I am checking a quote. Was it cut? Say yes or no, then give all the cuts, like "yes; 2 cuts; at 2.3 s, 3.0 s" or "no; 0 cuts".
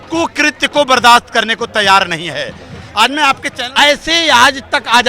yes; 1 cut; at 3.5 s